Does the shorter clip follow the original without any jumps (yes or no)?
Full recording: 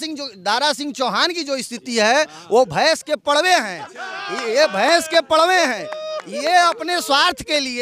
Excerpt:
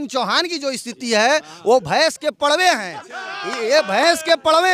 yes